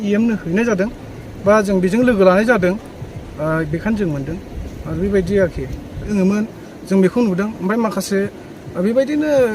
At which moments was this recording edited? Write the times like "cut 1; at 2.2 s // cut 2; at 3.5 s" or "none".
cut 1; at 6.1 s

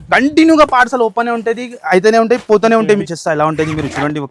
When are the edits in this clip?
cut 1; at 3.0 s

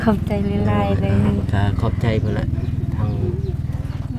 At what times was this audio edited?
none

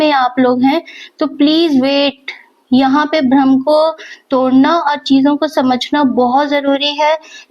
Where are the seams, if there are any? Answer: none

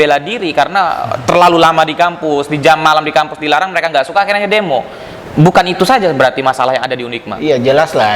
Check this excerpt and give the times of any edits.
none

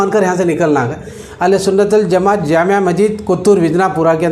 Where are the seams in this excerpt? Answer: cut 1; at 1.2 s

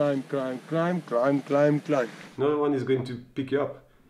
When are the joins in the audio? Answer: cut 1; at 2.2 s

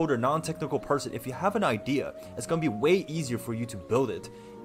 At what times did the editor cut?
none

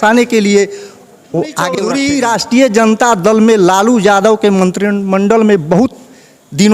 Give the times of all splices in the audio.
cut 1; at 1.8 s

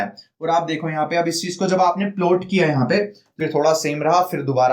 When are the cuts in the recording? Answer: cut 1; at 3.2 s

